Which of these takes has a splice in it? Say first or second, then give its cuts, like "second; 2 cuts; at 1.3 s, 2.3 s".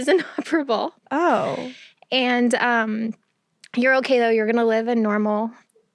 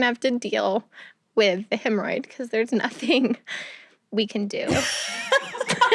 second; 1 cut; at 4.7 s